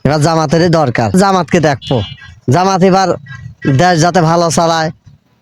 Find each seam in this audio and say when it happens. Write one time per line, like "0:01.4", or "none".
0:01.1

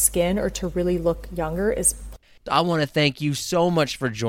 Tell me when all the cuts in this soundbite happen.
0:02.5

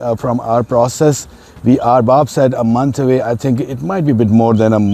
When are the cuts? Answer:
none

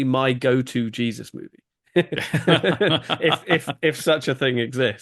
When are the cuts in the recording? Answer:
none

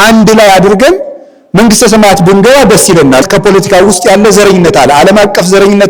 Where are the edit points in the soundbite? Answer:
0:03.2

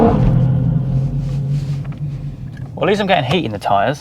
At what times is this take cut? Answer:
none

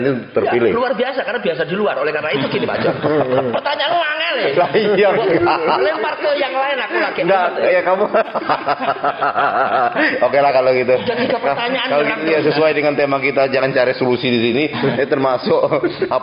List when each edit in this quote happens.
none

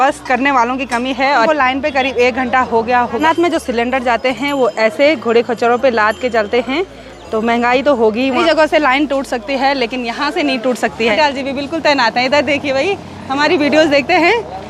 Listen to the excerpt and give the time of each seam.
0:01.5
0:03.2
0:08.4
0:11.1

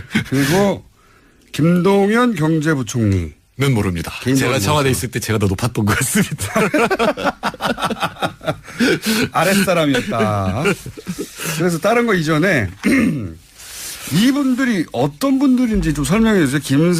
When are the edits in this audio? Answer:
0:06.4

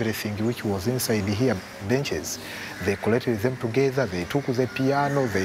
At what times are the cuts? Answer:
0:02.0
0:04.2

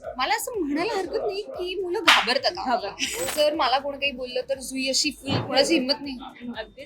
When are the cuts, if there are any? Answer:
0:03.3
0:05.4

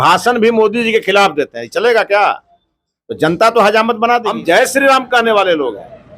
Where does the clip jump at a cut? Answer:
0:04.3

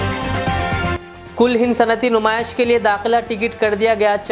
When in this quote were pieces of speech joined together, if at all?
none

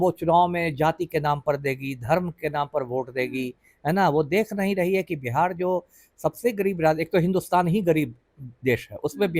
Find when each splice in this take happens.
none

